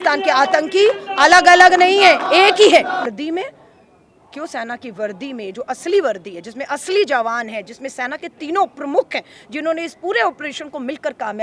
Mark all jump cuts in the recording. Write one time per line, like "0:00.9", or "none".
0:03.1